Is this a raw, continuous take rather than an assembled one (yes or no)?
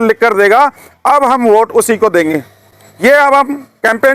yes